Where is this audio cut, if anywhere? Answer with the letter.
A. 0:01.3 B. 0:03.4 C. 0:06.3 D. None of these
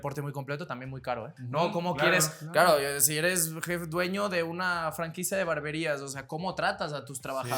A